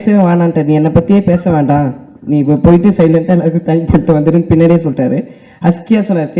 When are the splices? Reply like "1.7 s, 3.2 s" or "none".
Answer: none